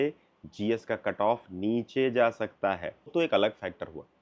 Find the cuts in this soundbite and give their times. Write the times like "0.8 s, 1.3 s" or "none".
3.1 s